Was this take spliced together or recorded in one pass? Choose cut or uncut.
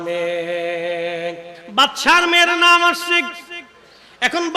cut